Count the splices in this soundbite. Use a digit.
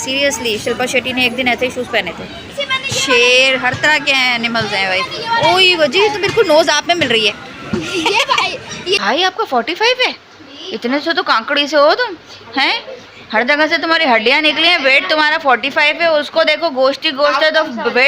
2